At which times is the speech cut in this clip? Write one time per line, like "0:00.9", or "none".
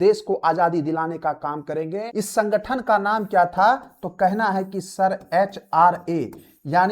0:02.0